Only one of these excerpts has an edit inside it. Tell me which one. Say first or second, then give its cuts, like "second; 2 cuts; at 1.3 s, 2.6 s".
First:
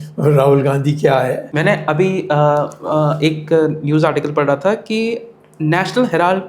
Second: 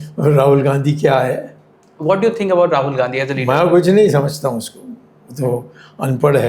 first; 1 cut; at 1.5 s